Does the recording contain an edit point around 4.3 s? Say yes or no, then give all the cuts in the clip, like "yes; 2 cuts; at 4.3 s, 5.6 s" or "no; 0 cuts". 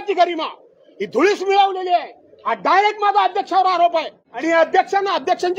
yes; 1 cut; at 4.3 s